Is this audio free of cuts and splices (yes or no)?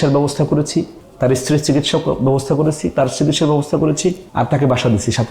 no